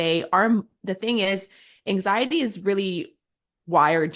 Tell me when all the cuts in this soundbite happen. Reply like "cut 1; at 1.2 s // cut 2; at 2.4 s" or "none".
none

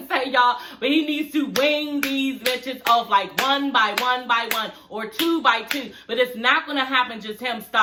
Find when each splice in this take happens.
none

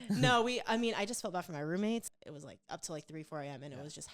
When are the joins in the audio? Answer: cut 1; at 2.1 s

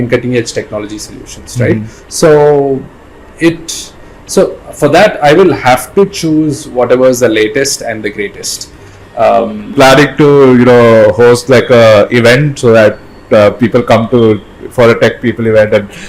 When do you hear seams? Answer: cut 1; at 9.7 s

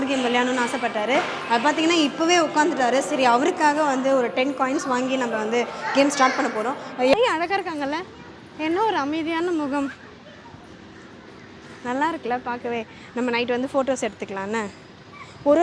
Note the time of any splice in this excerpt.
cut 1; at 7.1 s

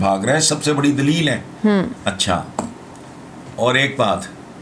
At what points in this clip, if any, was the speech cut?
none

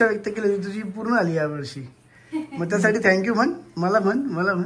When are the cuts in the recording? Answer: none

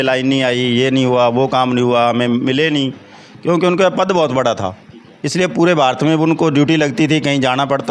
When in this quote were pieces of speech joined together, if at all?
none

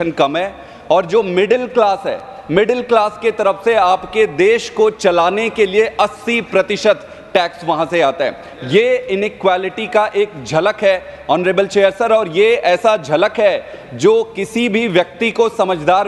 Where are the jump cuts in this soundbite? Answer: none

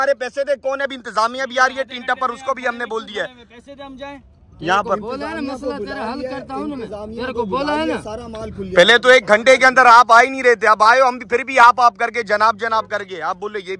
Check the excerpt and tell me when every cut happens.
none

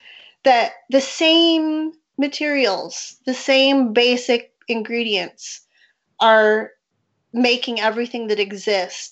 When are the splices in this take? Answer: none

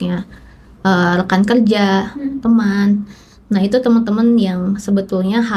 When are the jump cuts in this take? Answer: none

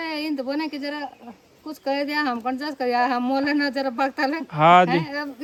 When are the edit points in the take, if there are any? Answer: none

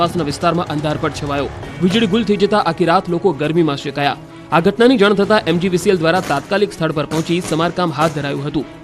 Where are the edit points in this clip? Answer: cut 1; at 2.0 s

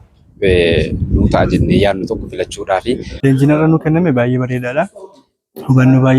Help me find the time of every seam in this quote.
cut 1; at 3.1 s

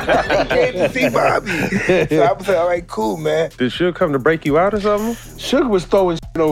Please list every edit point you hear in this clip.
cut 1; at 3.5 s

